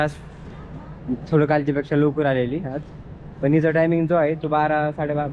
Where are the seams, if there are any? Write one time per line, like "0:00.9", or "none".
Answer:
none